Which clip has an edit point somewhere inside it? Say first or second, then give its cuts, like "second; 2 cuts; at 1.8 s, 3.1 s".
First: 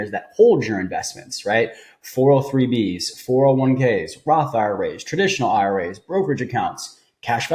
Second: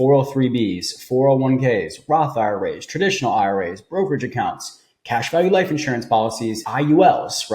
second; 1 cut; at 6.6 s